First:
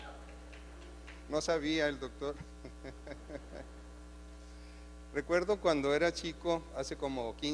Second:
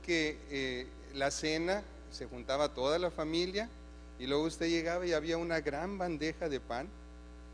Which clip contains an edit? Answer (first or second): second